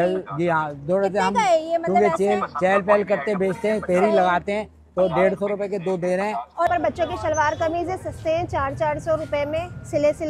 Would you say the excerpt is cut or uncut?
cut